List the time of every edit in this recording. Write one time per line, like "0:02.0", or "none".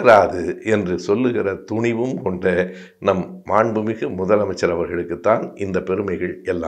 none